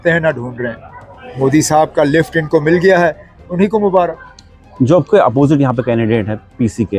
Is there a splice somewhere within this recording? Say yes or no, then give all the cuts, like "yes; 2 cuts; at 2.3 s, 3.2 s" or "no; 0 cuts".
no; 0 cuts